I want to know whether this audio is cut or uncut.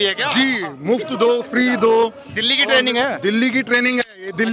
uncut